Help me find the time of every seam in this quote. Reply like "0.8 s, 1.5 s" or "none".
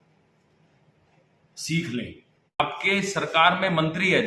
2.6 s